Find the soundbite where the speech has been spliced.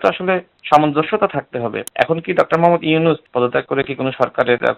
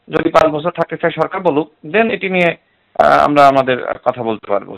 first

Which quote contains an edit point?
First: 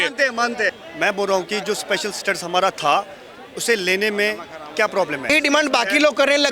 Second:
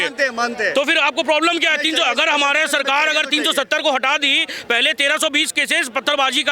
first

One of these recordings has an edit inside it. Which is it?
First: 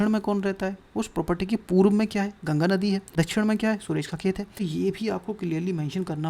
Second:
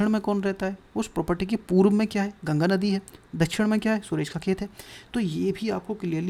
first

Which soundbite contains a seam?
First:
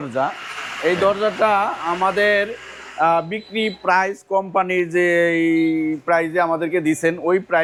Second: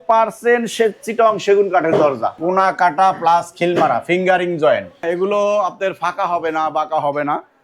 second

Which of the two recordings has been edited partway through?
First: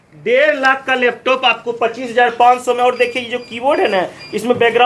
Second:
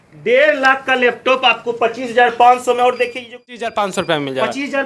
second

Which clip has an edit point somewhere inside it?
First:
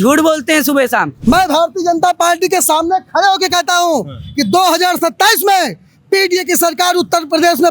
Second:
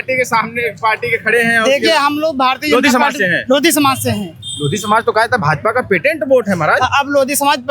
first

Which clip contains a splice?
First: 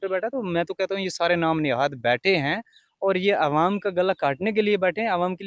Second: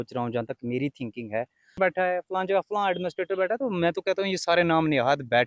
second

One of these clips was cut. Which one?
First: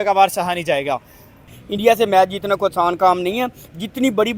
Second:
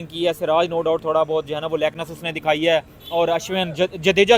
first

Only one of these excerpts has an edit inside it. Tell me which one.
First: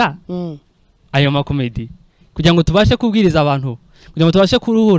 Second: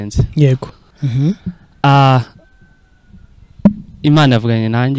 second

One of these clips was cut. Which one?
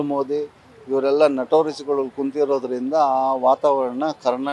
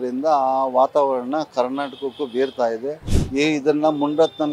second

